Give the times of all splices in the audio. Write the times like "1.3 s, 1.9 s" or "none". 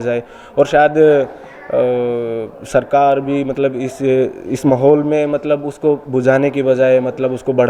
none